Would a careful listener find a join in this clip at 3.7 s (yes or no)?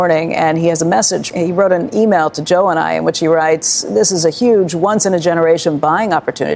no